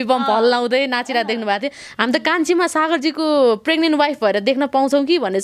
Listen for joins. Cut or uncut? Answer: uncut